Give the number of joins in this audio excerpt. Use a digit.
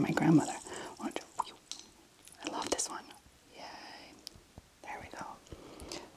1